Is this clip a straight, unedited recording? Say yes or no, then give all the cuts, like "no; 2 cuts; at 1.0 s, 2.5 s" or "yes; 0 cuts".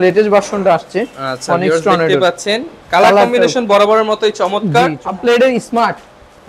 no; 1 cut; at 5.0 s